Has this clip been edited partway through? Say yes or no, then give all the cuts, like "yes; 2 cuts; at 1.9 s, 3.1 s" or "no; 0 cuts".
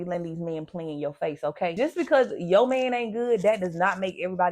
yes; 1 cut; at 1.7 s